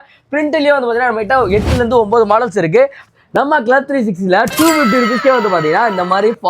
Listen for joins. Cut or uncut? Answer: cut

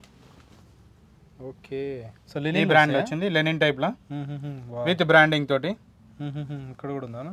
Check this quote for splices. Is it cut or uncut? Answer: uncut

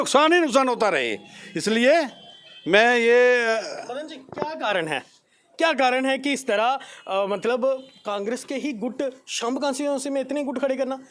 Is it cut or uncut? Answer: uncut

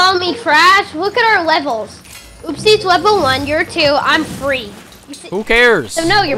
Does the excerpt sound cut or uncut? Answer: uncut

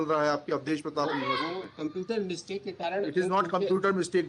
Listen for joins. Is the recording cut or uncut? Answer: uncut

